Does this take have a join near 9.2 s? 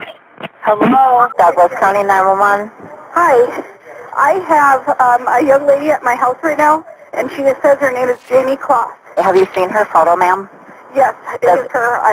yes; 2 cuts; at 1.3 s, 9.2 s

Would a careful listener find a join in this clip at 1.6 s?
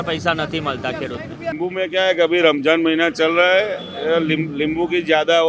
yes; 1 cut; at 1.6 s

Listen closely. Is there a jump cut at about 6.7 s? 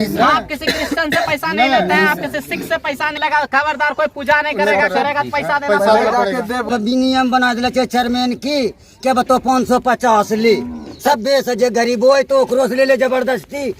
yes; 2 cuts; at 3.2 s, 6.7 s

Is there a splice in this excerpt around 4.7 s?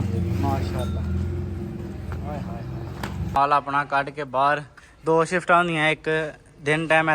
no; 1 cut; at 3.4 s

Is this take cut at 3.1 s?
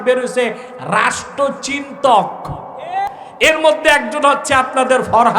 yes; 1 cut; at 3.1 s

